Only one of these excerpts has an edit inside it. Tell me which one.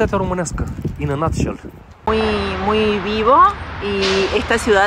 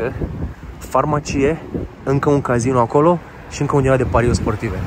first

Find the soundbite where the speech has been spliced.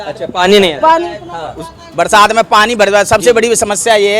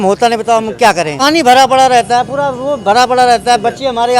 second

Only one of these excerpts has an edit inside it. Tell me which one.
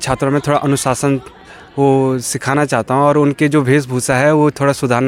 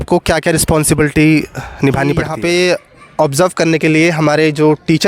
second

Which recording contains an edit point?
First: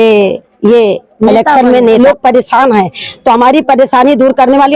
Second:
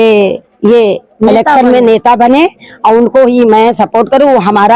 first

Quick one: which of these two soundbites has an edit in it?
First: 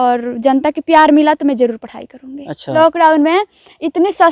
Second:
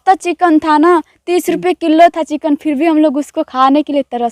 first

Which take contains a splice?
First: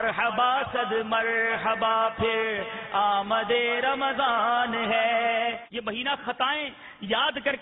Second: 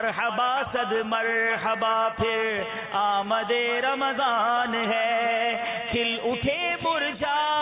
first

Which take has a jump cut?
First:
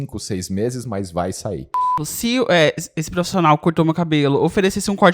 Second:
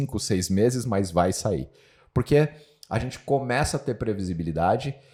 first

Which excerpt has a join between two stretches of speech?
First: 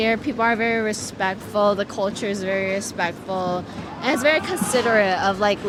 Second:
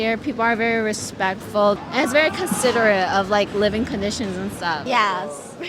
second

